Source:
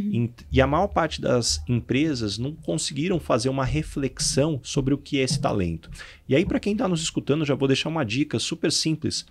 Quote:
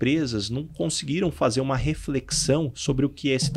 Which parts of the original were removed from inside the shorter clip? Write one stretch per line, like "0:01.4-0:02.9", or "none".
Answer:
none